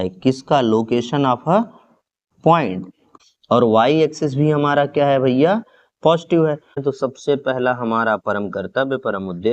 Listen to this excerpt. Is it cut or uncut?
cut